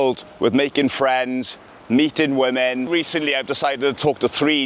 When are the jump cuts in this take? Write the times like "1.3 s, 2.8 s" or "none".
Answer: 2.9 s